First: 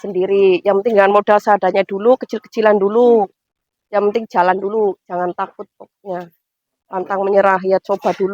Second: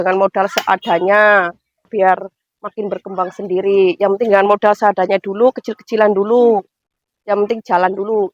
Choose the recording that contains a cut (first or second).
second